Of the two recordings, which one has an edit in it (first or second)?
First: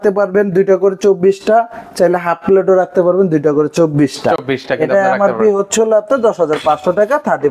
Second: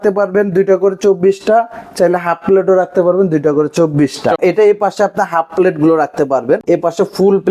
second